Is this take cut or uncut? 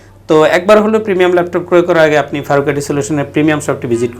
uncut